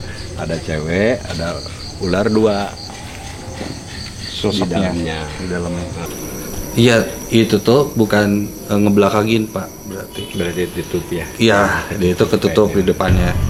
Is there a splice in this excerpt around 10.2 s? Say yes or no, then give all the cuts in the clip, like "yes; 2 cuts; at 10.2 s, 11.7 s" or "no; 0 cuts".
no; 1 cut; at 6.1 s